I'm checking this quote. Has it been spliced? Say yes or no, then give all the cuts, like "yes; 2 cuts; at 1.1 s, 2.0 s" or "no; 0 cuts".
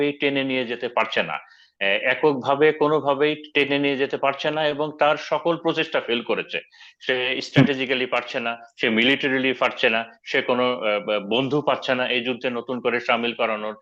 no; 0 cuts